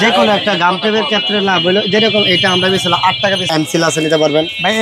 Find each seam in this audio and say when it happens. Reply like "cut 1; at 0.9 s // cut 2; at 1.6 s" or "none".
cut 1; at 3.5 s